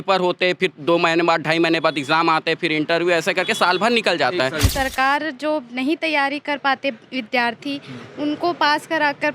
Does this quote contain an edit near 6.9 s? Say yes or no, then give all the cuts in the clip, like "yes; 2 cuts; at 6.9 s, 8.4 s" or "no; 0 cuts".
no; 1 cut; at 4.7 s